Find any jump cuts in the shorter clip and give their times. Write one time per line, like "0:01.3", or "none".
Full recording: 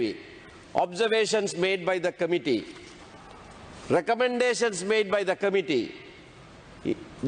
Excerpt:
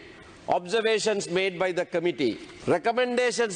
0:02.5